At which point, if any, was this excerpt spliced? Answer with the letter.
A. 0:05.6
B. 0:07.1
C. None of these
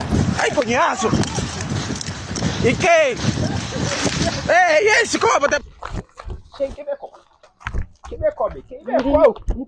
A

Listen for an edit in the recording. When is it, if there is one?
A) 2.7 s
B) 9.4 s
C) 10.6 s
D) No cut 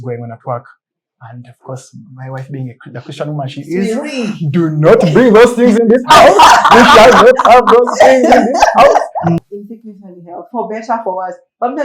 B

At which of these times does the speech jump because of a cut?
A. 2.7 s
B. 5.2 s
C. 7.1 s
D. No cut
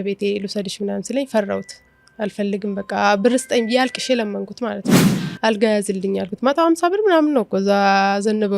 B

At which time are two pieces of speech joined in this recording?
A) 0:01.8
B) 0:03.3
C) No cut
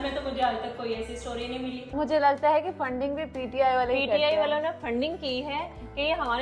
A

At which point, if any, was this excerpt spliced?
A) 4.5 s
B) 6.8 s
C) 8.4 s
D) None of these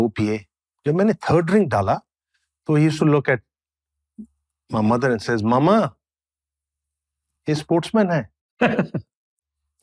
D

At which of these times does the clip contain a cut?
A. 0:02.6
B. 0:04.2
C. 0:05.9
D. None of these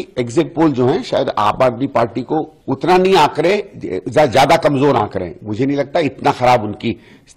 A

